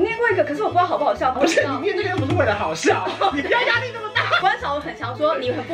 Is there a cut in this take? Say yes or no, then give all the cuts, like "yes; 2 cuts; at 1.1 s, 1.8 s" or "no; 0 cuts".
yes; 2 cuts; at 1.4 s, 4.4 s